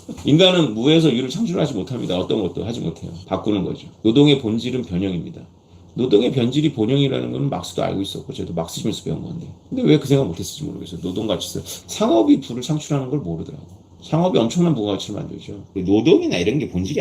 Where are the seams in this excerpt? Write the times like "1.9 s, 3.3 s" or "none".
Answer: 11.7 s, 15.7 s